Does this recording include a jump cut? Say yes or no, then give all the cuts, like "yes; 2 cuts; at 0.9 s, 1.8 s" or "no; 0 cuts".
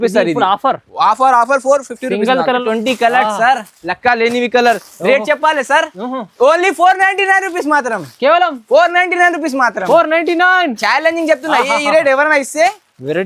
yes; 1 cut; at 2.6 s